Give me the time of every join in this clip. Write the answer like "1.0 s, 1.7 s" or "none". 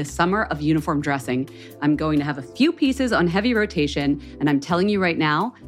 none